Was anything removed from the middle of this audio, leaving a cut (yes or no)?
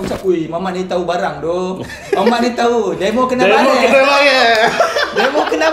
no